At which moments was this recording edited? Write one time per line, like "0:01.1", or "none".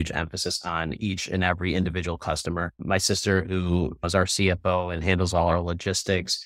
0:04.0